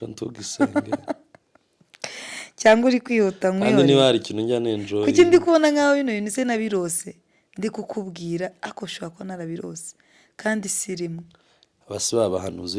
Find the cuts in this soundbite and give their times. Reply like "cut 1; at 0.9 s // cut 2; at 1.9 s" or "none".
none

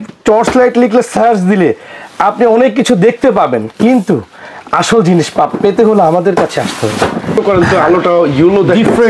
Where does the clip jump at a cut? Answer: cut 1; at 7.4 s

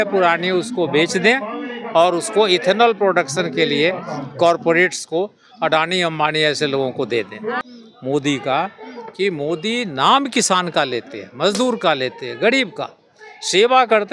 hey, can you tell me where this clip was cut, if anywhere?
cut 1; at 7.6 s

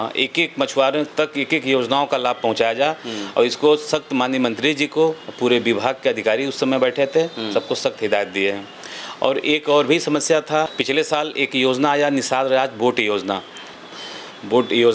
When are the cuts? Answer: cut 1; at 10.8 s // cut 2; at 13.7 s

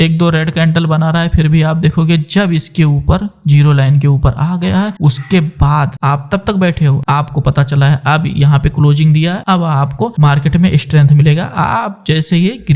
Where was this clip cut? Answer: none

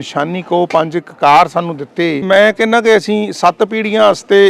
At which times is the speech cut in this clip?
cut 1; at 2.2 s

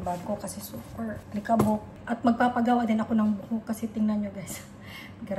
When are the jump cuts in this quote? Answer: cut 1; at 1.2 s // cut 2; at 2.0 s

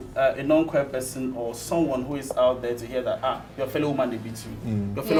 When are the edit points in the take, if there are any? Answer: none

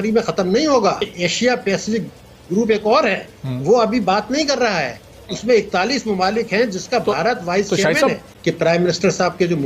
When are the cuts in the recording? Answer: cut 1; at 1.1 s // cut 2; at 8.3 s

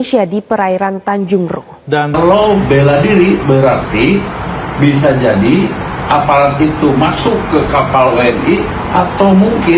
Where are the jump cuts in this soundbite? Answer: cut 1; at 2.1 s

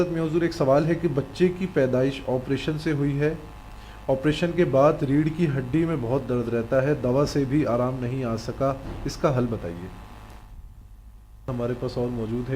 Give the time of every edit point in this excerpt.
cut 1; at 11.5 s

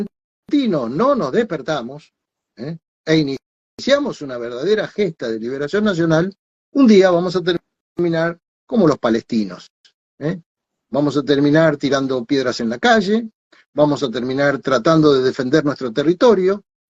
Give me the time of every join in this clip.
none

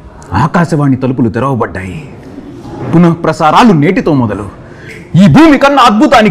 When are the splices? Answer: none

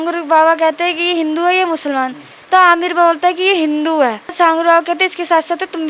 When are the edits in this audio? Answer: cut 1; at 4.3 s

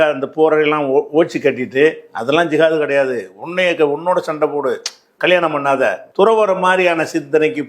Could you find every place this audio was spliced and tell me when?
cut 1; at 6.0 s

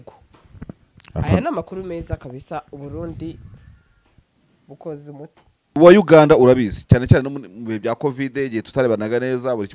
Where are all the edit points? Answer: cut 1; at 5.8 s

